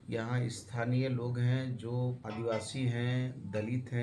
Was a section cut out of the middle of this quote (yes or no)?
yes